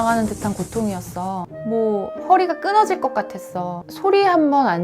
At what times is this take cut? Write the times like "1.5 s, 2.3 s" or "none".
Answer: 1.5 s, 3.8 s